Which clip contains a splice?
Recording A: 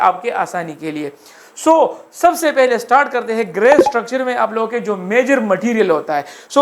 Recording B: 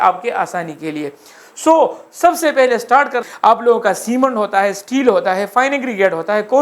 B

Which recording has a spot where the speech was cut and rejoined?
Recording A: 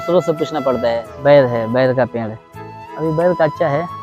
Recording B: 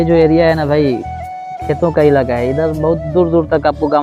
A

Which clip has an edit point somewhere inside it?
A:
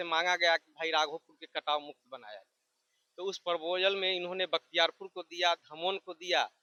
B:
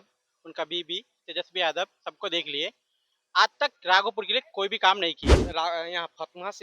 B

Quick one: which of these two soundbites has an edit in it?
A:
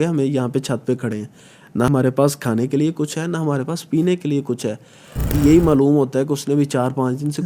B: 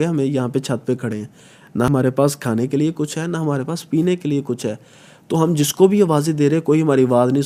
A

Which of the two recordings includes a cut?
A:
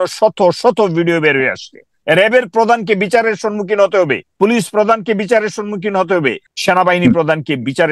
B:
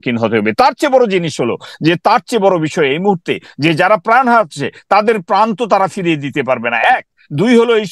A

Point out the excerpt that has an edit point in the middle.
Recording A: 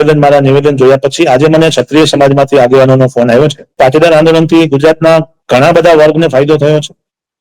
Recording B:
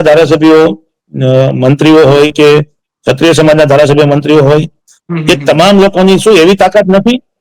A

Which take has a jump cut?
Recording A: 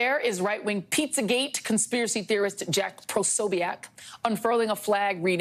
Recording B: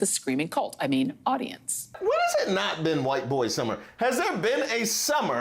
B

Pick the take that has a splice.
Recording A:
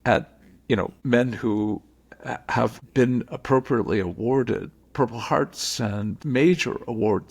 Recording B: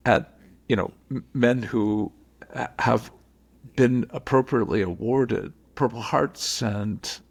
A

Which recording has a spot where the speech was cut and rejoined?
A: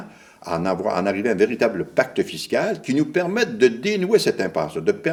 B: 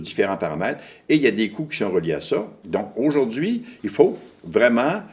B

